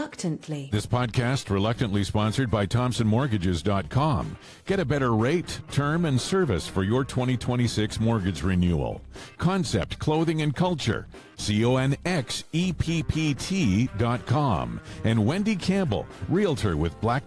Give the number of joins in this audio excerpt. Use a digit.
0